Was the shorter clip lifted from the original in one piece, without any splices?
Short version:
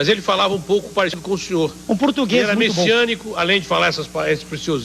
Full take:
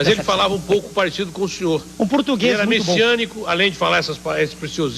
no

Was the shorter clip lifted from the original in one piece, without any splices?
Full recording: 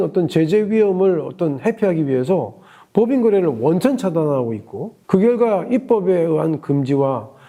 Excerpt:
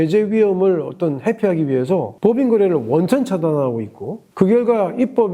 no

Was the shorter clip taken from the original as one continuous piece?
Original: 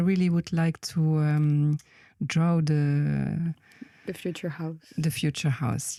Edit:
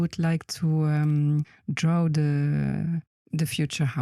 no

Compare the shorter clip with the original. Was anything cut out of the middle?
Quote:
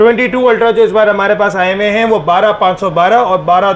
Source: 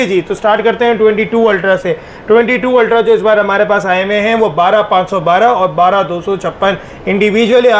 no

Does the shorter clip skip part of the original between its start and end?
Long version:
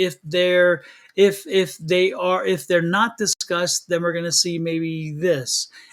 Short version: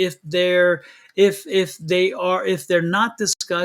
no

